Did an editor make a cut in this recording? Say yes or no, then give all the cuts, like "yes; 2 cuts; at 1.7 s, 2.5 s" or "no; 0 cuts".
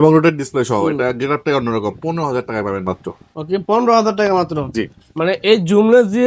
no; 0 cuts